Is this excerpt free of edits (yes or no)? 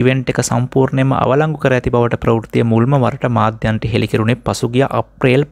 yes